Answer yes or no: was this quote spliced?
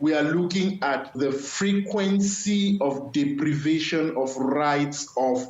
yes